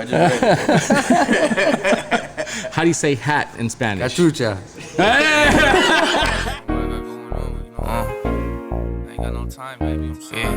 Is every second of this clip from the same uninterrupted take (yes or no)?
no